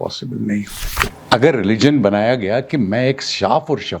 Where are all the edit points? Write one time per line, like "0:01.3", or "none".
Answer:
0:01.1